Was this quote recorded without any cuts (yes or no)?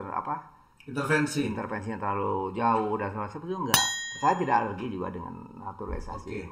no